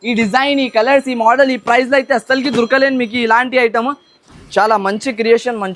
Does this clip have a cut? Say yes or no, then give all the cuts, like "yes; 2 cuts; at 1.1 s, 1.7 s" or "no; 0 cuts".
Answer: yes; 1 cut; at 4.1 s